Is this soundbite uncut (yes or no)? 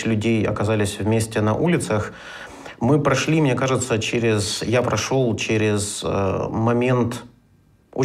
no